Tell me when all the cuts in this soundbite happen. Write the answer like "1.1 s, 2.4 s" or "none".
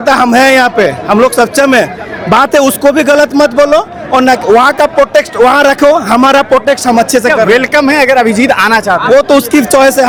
none